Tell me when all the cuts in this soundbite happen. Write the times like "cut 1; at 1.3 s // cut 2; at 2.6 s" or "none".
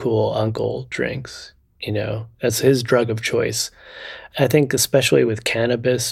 cut 1; at 4.2 s